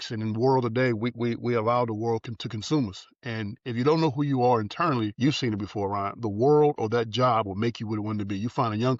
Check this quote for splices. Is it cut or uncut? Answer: uncut